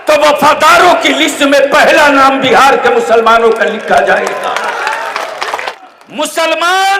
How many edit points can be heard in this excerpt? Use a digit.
1